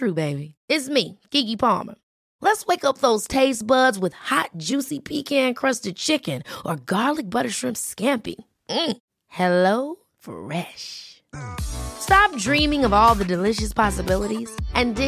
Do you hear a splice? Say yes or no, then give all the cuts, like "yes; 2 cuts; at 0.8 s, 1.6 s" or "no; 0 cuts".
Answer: no; 0 cuts